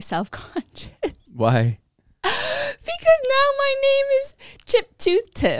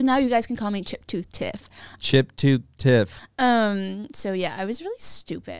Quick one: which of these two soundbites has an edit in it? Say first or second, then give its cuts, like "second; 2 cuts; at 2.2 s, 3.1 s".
second; 1 cut; at 3.2 s